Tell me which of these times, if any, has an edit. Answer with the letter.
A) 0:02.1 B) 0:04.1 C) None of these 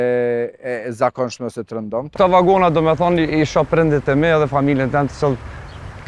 A